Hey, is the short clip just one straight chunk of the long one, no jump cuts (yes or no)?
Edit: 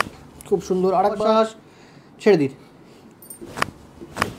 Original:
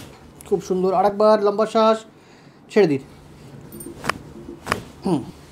no